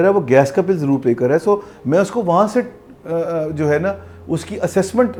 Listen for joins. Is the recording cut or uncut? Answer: uncut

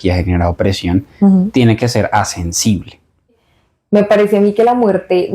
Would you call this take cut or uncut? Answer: cut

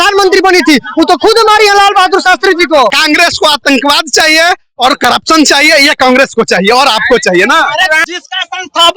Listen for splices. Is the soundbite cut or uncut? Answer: cut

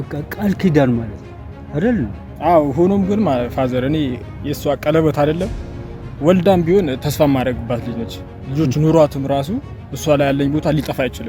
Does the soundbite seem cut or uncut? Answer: uncut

